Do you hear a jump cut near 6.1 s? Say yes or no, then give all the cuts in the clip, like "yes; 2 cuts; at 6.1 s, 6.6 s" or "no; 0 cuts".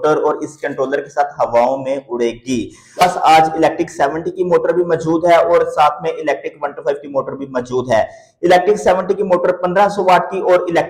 no; 1 cut; at 3.0 s